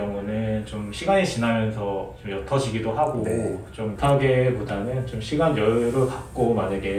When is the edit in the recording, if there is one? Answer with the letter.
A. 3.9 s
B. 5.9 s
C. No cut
A